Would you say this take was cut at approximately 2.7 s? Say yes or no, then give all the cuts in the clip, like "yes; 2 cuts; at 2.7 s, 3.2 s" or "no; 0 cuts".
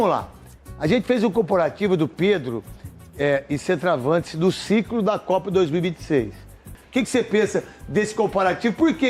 no; 1 cut; at 6.7 s